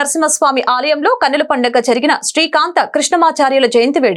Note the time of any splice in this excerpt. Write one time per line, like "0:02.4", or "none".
none